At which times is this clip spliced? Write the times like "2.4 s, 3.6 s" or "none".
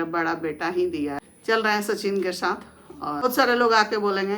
1.3 s, 3.2 s